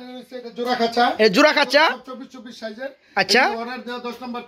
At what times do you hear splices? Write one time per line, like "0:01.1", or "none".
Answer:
none